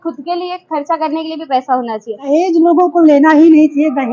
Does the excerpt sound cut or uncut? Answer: cut